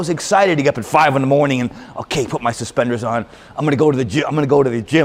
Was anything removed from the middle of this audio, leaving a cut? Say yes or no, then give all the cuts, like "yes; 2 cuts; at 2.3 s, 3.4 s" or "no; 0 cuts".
no; 0 cuts